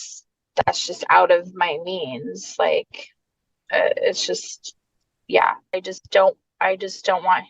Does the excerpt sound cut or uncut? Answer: cut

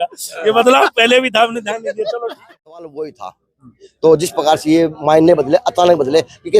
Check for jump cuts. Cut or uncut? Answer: cut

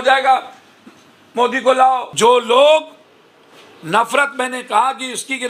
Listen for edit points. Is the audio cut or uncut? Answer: cut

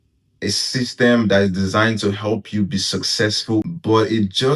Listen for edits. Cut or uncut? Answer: cut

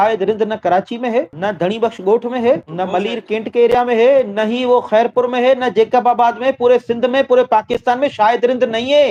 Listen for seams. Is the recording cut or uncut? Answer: uncut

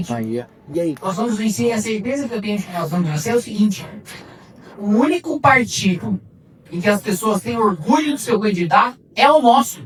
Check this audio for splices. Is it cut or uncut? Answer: uncut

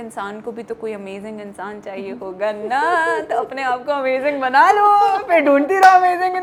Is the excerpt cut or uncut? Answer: uncut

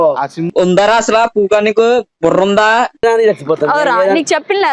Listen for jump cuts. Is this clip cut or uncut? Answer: cut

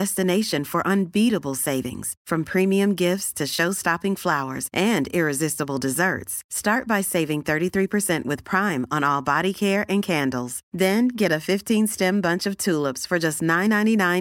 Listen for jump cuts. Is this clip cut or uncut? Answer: uncut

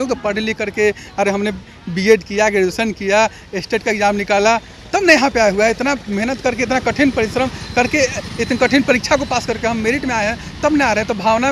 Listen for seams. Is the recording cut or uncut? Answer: uncut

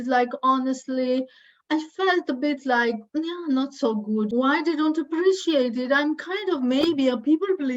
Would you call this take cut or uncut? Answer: cut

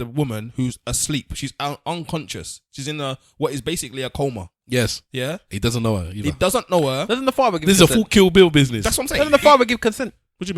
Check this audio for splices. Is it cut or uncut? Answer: uncut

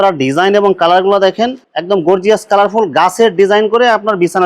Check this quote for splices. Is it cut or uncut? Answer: uncut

